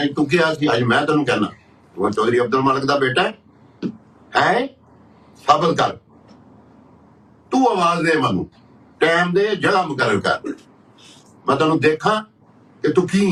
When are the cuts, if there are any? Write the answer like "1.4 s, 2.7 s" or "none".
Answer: none